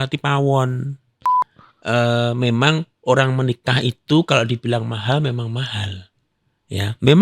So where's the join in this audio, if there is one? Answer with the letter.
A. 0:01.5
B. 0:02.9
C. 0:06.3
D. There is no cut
A